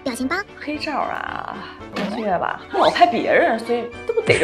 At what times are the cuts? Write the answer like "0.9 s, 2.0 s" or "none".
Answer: none